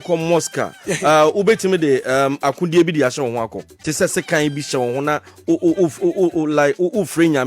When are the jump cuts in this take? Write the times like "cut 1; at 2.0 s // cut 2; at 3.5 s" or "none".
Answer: cut 1; at 3.7 s